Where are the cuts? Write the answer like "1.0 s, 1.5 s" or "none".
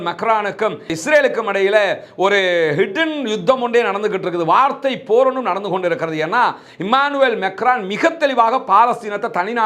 none